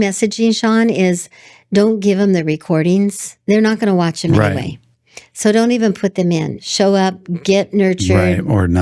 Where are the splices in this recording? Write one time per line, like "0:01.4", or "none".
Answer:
0:03.3
0:06.6